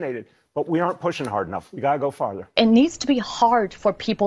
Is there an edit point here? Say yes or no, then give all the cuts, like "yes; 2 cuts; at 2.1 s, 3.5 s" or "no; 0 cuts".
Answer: yes; 1 cut; at 2.5 s